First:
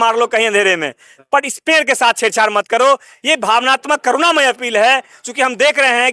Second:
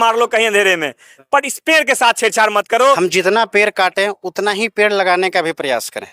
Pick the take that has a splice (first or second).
second